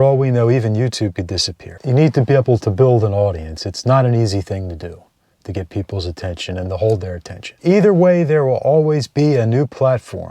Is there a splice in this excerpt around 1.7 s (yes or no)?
yes